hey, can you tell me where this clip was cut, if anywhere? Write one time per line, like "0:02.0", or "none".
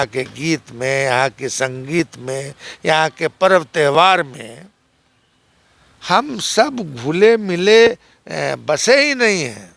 none